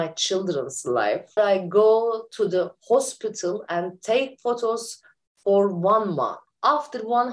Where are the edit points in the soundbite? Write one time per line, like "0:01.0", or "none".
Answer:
0:01.4
0:06.4